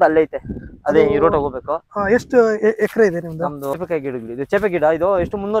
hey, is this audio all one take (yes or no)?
no